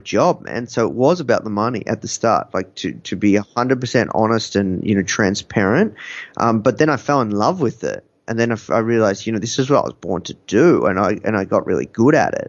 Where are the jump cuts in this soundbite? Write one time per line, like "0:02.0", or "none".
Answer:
none